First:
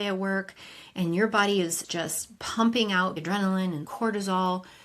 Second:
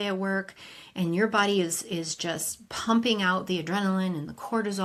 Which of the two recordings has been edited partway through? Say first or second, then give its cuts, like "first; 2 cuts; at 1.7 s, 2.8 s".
first; 2 cuts; at 1.8 s, 3.4 s